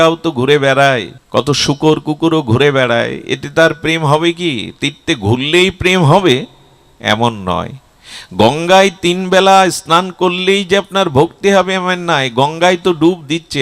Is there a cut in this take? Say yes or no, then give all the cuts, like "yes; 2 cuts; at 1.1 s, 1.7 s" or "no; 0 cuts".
yes; 1 cut; at 1.2 s